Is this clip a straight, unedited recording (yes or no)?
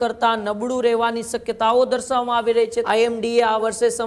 no